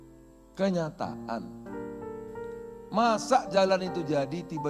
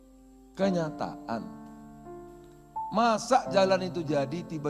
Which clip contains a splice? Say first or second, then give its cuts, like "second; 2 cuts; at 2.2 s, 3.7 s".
first; 2 cuts; at 1.7 s, 2.9 s